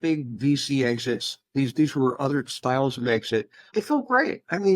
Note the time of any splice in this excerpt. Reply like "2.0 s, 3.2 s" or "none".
3.7 s